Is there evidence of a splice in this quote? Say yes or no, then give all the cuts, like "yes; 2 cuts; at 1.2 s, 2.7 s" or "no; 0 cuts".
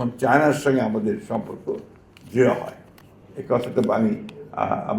no; 0 cuts